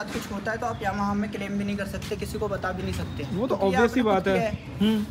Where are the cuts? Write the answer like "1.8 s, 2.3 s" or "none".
none